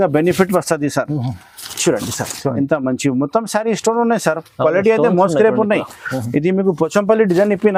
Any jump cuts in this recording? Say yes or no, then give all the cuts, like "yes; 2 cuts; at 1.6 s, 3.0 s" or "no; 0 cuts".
no; 0 cuts